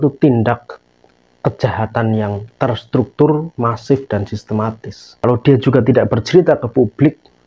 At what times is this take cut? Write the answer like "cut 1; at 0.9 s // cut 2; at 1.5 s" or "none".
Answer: cut 1; at 5.2 s